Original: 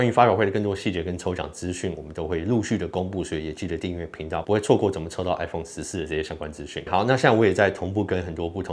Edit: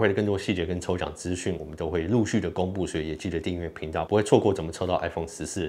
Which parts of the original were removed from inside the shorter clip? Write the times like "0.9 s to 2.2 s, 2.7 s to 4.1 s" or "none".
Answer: none